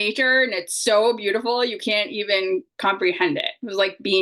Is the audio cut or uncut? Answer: uncut